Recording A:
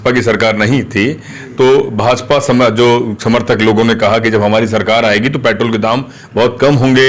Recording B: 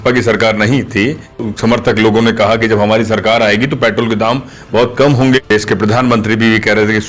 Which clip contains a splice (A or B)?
B